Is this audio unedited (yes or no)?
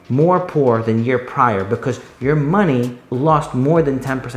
no